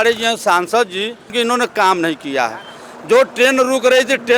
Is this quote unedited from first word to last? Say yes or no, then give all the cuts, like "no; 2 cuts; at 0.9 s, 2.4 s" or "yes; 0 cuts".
no; 1 cut; at 1.3 s